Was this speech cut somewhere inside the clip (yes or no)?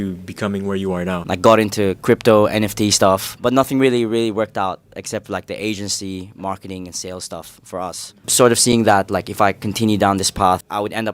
yes